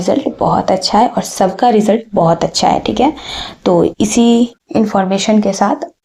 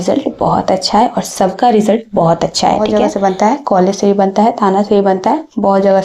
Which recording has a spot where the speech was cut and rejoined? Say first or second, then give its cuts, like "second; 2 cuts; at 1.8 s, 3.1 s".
second; 1 cut; at 2.8 s